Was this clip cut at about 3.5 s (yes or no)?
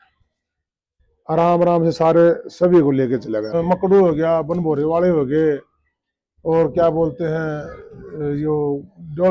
yes